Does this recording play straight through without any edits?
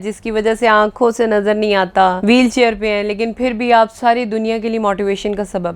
no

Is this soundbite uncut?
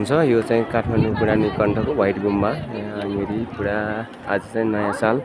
yes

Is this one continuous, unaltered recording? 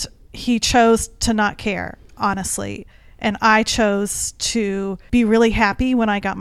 no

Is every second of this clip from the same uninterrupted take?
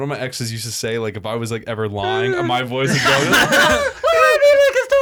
yes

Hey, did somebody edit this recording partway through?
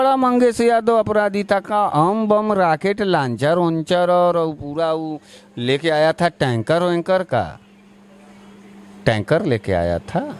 no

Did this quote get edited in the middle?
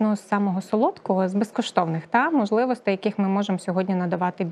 no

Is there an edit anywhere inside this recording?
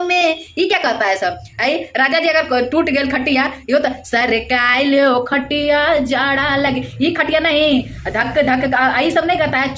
no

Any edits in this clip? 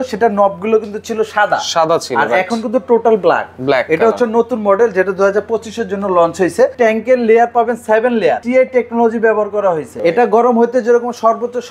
yes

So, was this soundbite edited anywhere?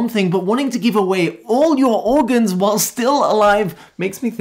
no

